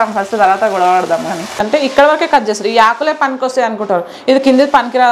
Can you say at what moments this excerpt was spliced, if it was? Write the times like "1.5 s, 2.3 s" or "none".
1.6 s

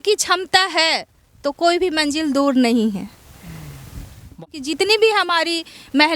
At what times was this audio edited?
4.4 s

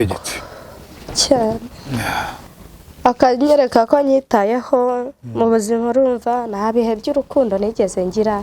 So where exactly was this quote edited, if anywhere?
2.5 s

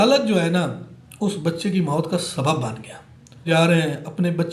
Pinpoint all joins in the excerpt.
3.4 s

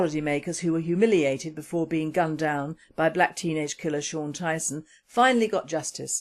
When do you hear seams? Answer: none

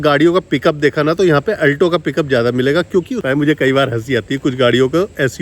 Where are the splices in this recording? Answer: 3.2 s

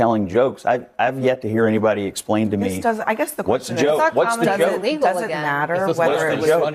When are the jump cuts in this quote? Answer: none

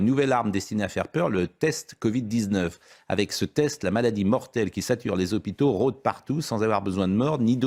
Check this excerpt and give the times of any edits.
none

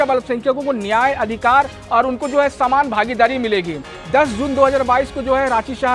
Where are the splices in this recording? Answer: 3.9 s

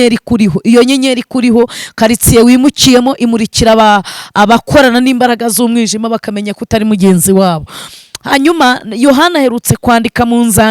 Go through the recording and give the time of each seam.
none

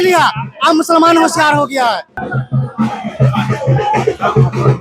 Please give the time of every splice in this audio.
2.3 s

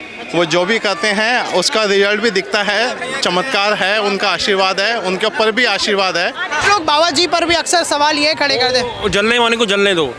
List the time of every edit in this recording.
6.6 s

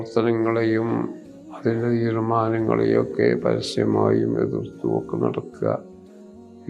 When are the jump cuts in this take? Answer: none

